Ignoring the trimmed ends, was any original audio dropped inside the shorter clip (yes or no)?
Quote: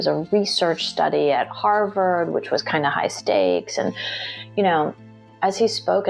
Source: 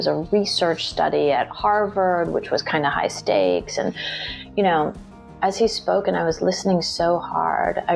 no